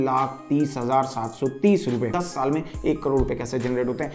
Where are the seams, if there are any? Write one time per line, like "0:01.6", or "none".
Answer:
0:02.2